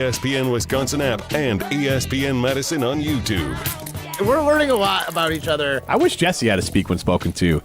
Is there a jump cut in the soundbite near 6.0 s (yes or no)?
no